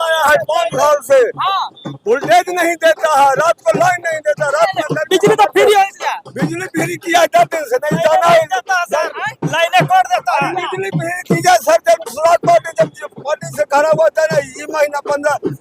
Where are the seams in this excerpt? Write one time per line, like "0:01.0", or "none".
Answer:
none

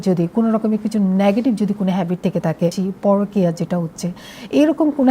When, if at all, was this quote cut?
0:02.8

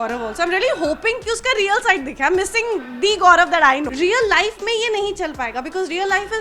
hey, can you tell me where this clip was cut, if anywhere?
0:03.9

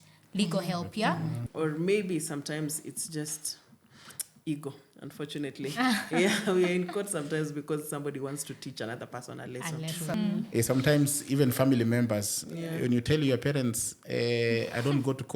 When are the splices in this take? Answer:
0:01.4
0:10.1

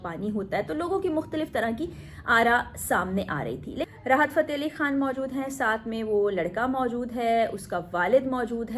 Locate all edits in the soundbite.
0:03.9

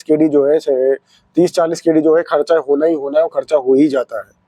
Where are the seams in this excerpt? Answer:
none

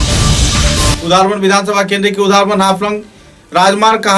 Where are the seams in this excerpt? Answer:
none

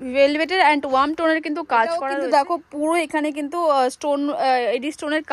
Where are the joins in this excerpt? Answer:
0:02.1

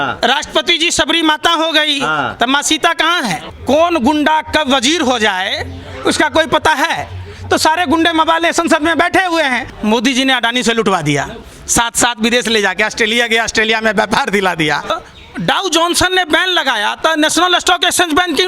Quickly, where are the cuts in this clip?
0:03.5
0:09.7
0:15.0

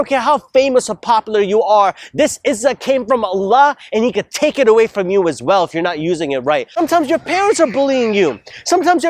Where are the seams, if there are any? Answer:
0:06.7

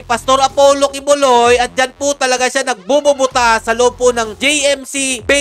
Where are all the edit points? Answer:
none

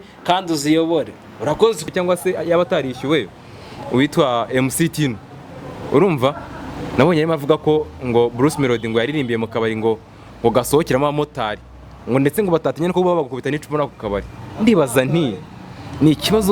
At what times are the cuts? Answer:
0:01.8

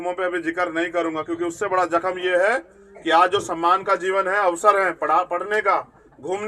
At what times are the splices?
none

